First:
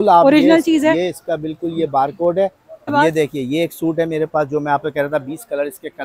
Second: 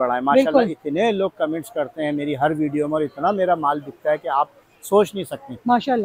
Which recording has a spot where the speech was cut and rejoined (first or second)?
first